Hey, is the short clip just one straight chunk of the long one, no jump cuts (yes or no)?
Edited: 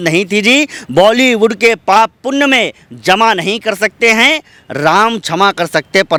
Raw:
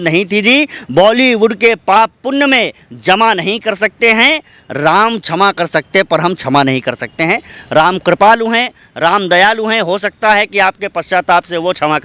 yes